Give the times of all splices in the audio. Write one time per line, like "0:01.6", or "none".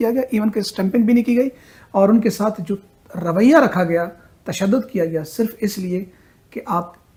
none